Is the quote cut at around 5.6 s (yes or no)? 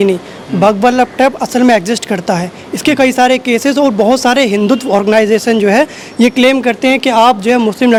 no